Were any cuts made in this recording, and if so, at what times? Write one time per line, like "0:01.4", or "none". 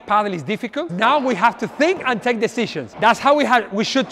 0:00.9
0:02.8